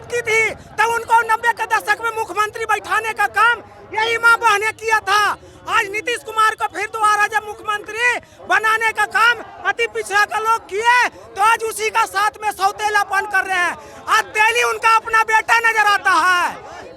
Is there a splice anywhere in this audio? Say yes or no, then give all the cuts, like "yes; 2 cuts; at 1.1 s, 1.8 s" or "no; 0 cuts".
no; 0 cuts